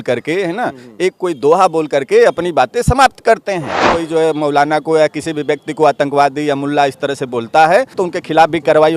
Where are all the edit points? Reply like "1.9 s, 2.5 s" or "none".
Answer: 4.0 s, 8.0 s